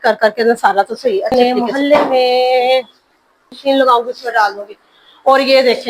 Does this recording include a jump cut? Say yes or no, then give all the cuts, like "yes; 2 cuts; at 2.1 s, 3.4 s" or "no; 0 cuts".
yes; 2 cuts; at 1.3 s, 3.6 s